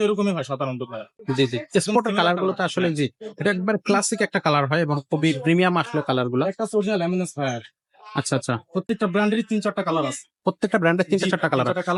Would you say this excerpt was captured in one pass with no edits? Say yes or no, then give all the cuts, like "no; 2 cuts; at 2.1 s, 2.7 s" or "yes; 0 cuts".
yes; 0 cuts